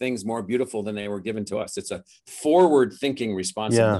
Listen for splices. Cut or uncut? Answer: uncut